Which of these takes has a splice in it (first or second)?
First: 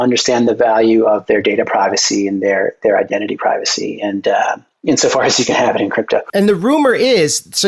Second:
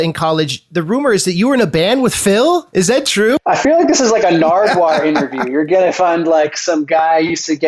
first